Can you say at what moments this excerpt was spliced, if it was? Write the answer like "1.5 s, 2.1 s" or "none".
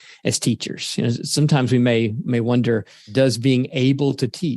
2.2 s, 3.1 s